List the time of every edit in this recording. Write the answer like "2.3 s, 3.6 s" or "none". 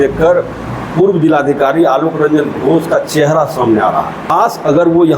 4.3 s